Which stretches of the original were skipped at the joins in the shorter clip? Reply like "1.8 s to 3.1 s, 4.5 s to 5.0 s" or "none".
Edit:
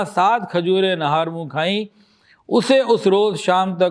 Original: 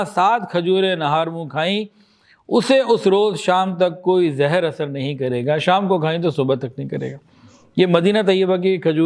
none